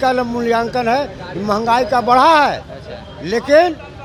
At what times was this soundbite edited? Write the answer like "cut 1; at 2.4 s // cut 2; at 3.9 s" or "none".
none